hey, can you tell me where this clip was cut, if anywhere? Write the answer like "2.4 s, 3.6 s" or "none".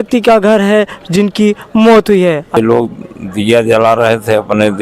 2.6 s